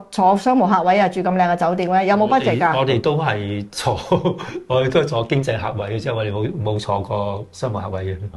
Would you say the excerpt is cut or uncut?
uncut